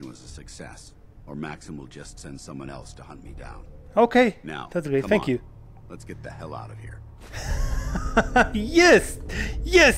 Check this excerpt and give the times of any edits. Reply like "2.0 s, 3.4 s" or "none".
none